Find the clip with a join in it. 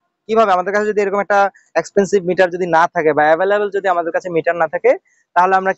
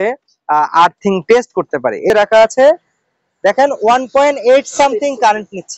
second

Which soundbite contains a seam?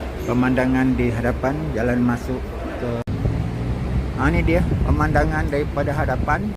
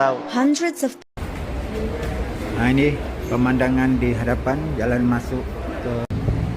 second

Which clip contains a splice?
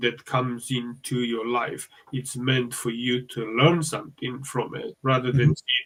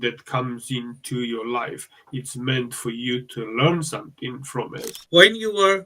second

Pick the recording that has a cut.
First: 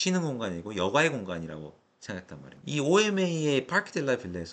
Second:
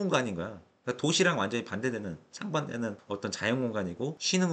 first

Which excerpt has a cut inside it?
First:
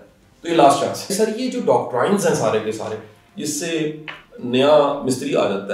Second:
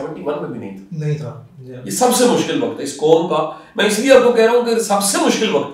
first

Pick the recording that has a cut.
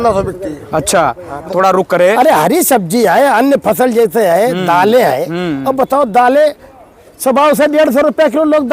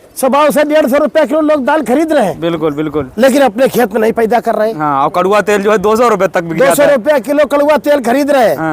first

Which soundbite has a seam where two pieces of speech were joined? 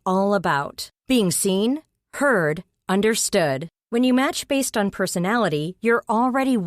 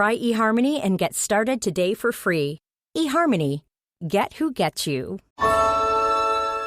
second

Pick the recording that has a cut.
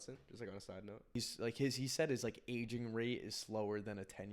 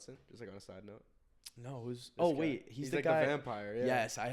first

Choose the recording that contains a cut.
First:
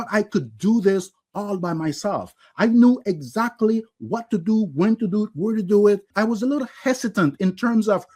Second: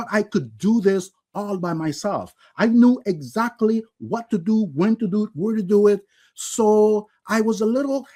first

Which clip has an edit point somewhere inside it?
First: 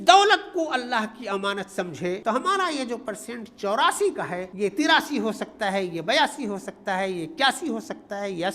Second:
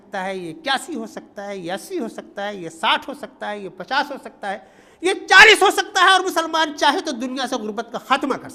first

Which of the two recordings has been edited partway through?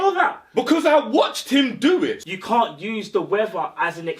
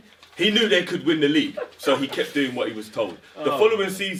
first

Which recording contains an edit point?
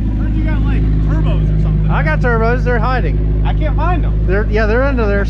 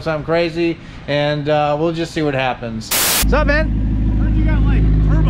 second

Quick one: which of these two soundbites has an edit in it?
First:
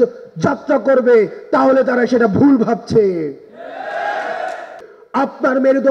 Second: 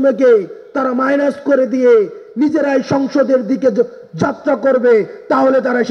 first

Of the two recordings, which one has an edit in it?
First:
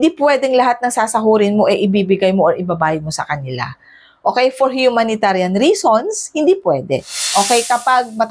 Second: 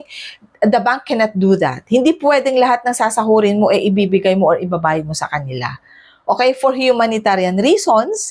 first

